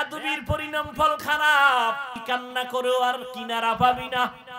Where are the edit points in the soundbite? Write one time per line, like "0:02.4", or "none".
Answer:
0:02.1